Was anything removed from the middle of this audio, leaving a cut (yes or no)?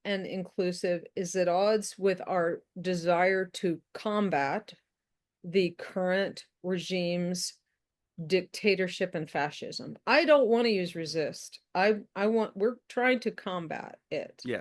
no